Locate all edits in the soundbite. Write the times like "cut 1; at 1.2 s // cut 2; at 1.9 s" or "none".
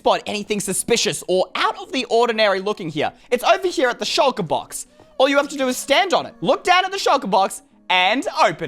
cut 1; at 3.2 s // cut 2; at 6.3 s

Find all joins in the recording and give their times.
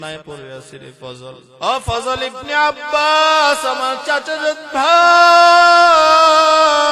cut 1; at 1.5 s

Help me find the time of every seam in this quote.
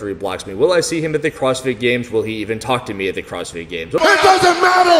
cut 1; at 4.0 s

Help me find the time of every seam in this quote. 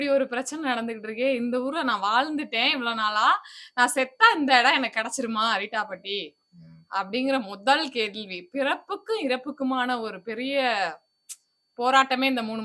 none

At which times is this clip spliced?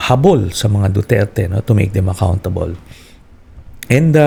none

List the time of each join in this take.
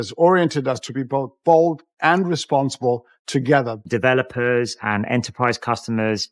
cut 1; at 3.9 s

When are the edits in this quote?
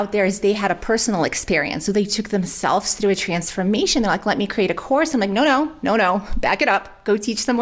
none

